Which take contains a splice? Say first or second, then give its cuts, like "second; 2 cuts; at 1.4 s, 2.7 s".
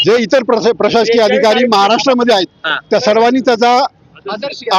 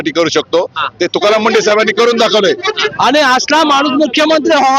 second; 1 cut; at 2.9 s